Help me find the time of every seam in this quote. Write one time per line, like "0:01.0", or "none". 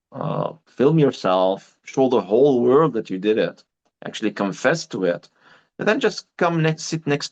none